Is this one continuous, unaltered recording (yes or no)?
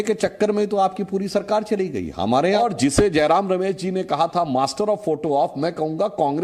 no